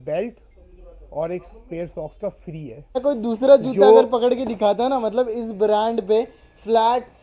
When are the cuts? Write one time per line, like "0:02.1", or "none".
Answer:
0:03.0